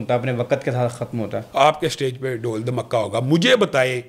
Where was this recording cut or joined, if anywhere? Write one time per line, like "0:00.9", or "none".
0:01.4